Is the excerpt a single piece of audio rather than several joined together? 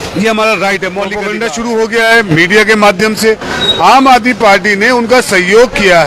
no; 1 cut; at 1.2 s

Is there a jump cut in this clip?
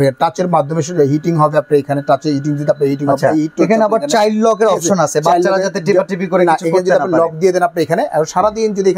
no; 0 cuts

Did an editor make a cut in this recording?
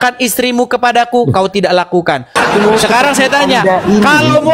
yes; 1 cut; at 2.4 s

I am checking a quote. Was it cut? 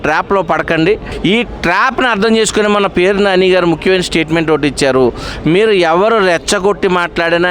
yes; 1 cut; at 1.1 s

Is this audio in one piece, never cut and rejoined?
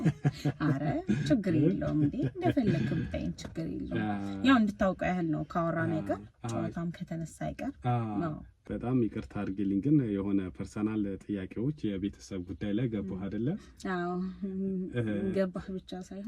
no; 1 cut; at 8.5 s

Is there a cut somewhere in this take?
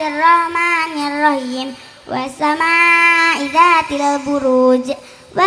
no; 0 cuts

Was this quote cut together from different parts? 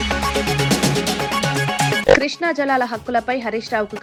no; 0 cuts

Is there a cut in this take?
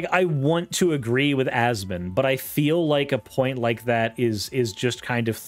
no; 0 cuts

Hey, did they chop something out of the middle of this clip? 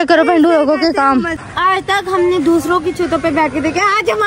yes; 1 cut; at 1.4 s

